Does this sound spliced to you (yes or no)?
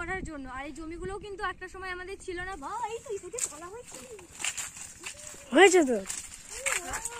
yes